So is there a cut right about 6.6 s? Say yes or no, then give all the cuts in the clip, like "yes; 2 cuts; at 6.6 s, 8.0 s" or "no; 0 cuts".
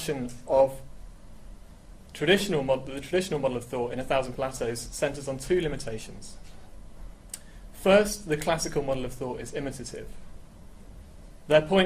yes; 1 cut; at 6.6 s